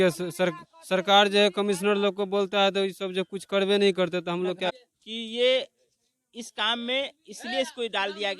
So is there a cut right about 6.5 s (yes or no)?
no